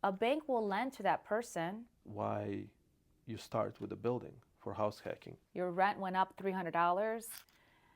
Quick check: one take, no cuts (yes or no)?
no